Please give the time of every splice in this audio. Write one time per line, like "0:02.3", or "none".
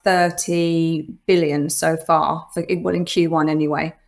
none